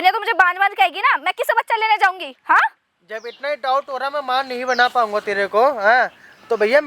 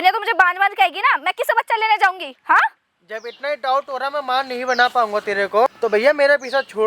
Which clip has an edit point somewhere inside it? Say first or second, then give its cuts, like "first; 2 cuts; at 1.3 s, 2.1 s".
second; 1 cut; at 5.7 s